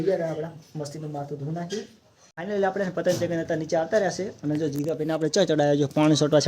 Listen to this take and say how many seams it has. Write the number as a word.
one